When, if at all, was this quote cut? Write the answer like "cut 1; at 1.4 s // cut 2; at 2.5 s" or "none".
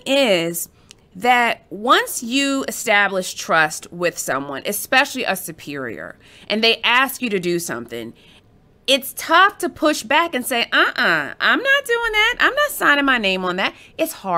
none